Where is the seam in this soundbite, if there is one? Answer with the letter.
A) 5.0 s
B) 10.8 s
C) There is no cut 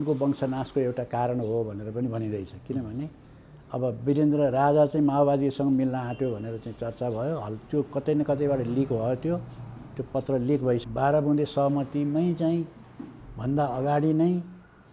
B